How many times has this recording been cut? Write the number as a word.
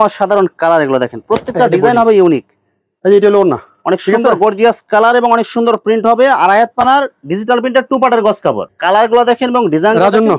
two